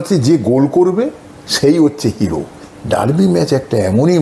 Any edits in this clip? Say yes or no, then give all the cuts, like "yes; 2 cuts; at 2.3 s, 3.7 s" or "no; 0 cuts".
yes; 1 cut; at 2.6 s